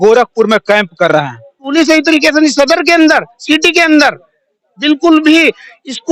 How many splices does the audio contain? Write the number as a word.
one